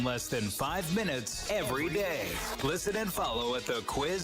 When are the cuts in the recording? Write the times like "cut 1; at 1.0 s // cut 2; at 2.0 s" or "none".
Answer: cut 1; at 2.4 s